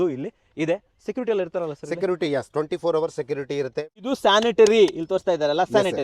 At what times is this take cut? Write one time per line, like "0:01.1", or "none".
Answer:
0:04.0